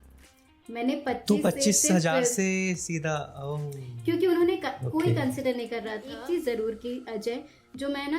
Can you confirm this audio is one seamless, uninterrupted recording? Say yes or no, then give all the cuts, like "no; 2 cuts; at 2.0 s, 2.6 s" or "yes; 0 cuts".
no; 1 cut; at 6.1 s